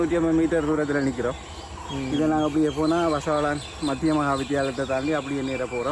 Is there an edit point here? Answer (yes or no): no